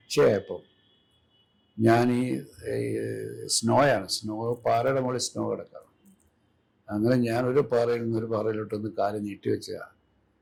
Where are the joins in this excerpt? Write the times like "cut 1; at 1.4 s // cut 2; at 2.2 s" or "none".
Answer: none